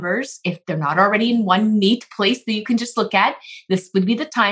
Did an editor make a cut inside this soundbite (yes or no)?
no